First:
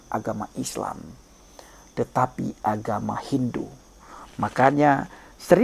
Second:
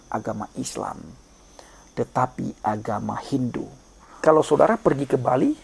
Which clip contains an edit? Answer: second; 1 cut; at 4.2 s

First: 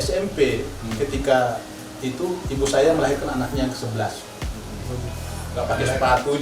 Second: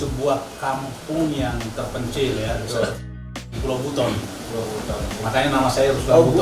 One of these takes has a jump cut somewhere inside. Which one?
first; 1 cut; at 5.4 s

